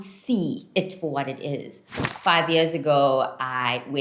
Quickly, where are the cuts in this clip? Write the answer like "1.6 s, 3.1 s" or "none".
2.0 s

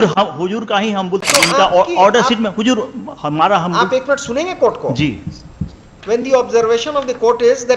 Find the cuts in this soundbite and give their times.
1.3 s

